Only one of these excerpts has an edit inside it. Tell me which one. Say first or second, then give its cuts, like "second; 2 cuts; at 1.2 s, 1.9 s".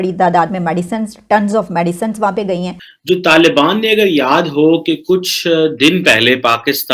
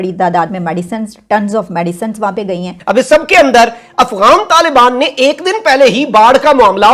second; 1 cut; at 2.7 s